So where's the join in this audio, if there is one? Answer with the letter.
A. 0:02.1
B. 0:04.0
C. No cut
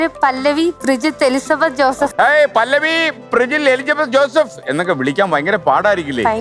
A